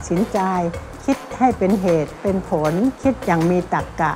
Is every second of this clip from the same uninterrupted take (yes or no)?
yes